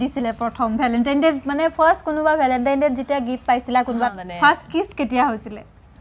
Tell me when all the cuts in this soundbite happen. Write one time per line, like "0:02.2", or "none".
0:04.2